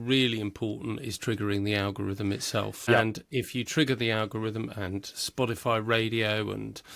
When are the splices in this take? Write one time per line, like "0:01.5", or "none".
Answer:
0:02.8